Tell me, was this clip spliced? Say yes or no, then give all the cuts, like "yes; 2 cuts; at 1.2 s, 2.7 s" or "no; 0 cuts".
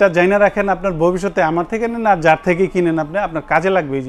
no; 0 cuts